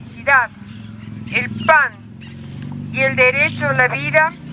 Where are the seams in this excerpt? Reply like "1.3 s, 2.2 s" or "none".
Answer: 3.2 s

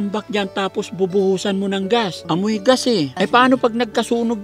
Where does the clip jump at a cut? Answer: 2.2 s, 3.1 s

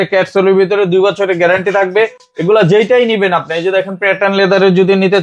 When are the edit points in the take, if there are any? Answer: none

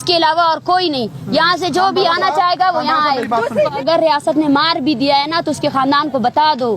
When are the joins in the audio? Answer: 3.8 s

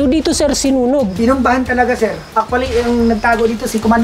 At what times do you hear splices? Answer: 1.1 s, 2.2 s

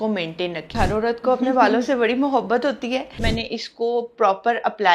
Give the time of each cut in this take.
0.7 s, 3.3 s

